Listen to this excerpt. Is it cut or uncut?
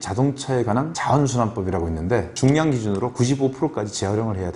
cut